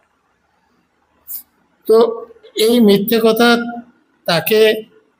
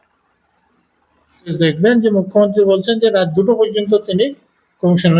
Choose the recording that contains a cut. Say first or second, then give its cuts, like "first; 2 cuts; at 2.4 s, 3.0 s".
second; 1 cut; at 1.5 s